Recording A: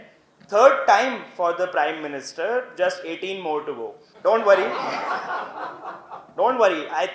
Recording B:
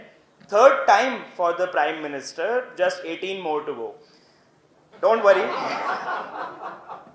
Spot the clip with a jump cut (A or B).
A